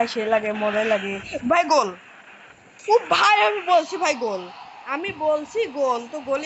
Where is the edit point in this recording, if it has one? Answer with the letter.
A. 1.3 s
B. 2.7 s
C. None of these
C